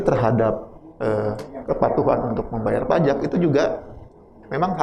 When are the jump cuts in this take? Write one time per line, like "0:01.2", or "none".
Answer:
none